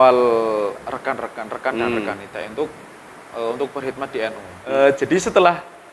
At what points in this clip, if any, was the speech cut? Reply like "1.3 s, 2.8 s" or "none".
4.6 s